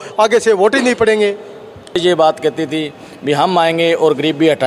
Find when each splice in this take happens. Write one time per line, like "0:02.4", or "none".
0:02.0